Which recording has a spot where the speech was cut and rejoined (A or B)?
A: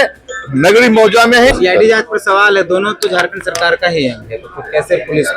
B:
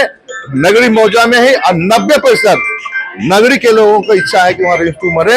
A